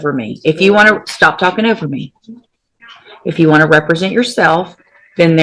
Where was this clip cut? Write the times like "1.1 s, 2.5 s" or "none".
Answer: none

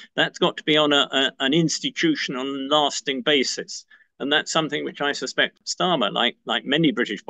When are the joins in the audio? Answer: 5.6 s

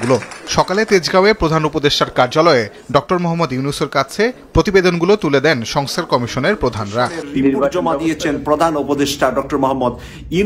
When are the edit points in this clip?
7.7 s

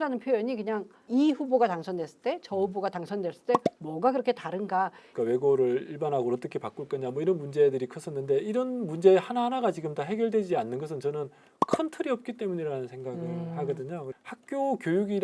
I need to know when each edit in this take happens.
1.0 s, 5.0 s, 14.0 s

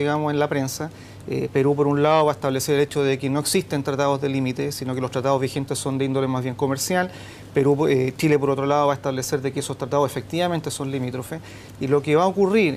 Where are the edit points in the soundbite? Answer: none

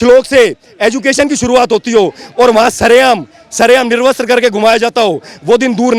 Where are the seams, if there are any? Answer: none

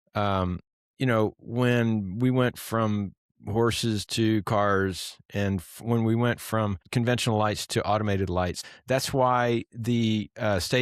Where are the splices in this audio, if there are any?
6.8 s, 8.6 s

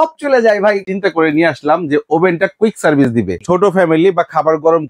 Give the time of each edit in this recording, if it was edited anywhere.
0.9 s, 3.4 s

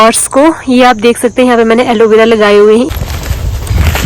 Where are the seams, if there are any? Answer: 2.9 s

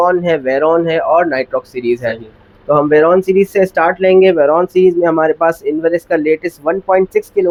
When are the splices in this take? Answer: none

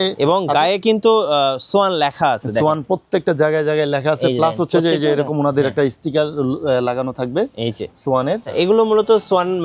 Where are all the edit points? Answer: 8.5 s

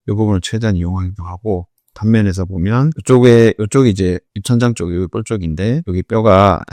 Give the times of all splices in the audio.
none

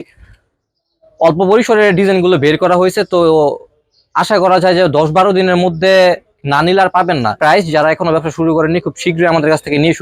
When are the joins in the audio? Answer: 7.4 s

